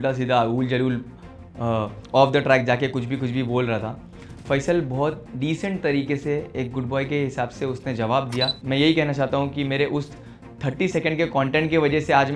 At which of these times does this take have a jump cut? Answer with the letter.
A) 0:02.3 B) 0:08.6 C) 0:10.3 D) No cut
B